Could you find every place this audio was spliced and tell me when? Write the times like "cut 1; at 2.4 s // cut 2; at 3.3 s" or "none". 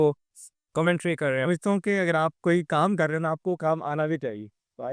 cut 1; at 1.4 s